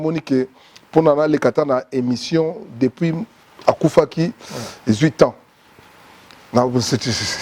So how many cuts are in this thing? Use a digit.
0